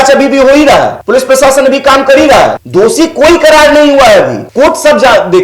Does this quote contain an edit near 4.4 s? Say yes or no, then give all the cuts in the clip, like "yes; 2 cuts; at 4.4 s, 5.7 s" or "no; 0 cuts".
yes; 3 cuts; at 1.0 s, 2.6 s, 4.4 s